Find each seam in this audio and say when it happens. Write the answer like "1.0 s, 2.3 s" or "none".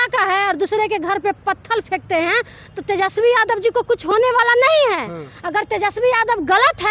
none